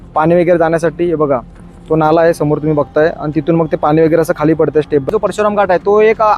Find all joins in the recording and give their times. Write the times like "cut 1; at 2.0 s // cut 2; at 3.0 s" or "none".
cut 1; at 5.1 s